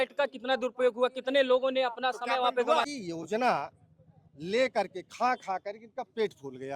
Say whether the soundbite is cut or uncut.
cut